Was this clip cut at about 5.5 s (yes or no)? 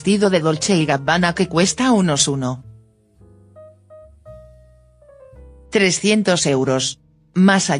yes